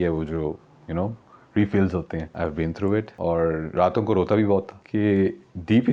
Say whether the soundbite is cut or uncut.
cut